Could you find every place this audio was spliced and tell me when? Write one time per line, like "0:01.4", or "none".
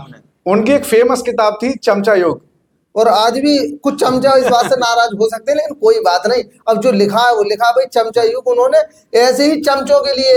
none